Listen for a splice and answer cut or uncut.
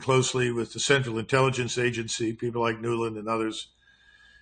uncut